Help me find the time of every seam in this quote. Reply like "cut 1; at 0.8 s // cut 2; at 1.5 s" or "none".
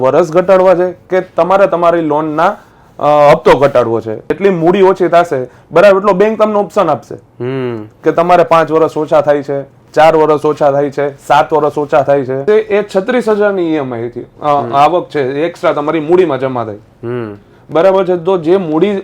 cut 1; at 4.3 s // cut 2; at 12.4 s